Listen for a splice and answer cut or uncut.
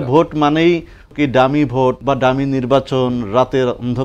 cut